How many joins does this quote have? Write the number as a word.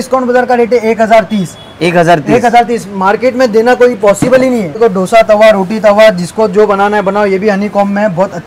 one